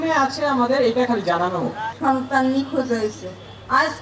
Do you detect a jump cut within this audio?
yes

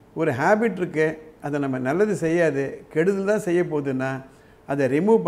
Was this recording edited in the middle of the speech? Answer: no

